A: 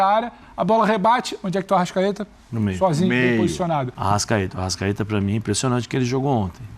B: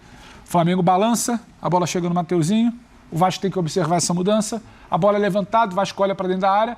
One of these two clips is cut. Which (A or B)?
A